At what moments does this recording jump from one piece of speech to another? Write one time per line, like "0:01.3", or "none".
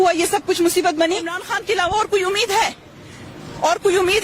0:01.5